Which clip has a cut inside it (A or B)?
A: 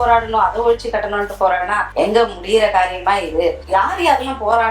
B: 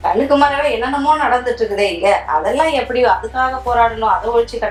A